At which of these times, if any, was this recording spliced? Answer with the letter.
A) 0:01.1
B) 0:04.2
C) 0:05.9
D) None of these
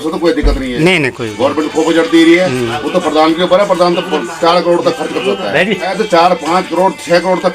C